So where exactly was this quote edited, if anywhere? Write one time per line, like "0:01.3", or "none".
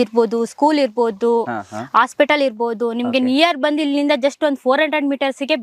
none

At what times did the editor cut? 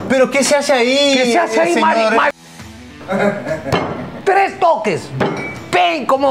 none

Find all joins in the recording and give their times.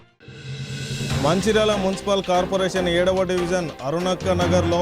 0:01.1

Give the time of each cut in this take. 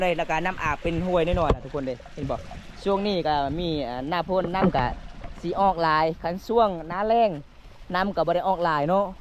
none

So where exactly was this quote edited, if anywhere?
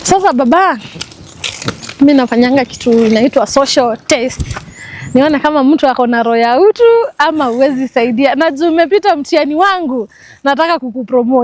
none

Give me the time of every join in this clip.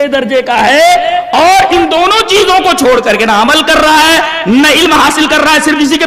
none

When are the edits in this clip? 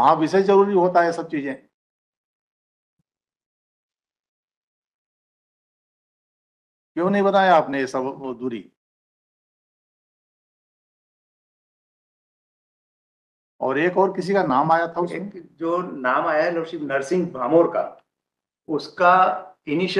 none

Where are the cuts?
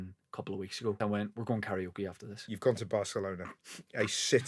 0:01.0
0:02.4

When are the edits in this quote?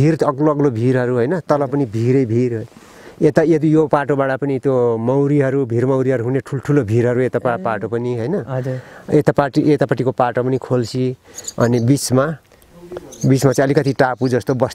none

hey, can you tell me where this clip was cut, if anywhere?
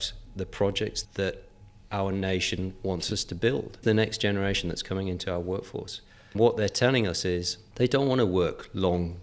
0:01.0
0:03.8
0:06.4
0:07.6

